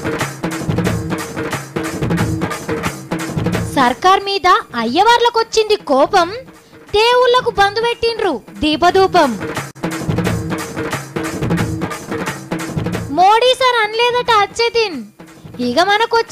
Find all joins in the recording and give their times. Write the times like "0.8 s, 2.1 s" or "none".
9.7 s, 11.6 s